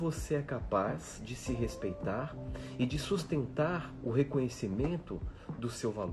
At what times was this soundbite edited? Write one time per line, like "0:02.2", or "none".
none